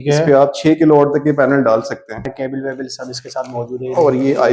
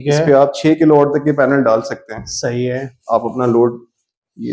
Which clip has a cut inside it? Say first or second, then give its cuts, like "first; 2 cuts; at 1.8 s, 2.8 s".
first; 1 cut; at 2.3 s